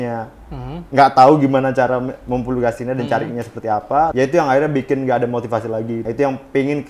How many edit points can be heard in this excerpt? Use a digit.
2